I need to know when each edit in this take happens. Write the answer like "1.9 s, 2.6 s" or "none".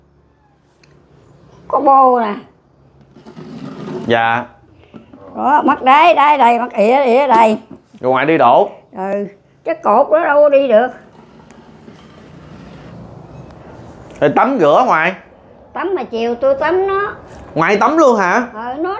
none